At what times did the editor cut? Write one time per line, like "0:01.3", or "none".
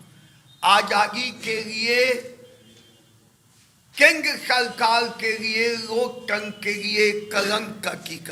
none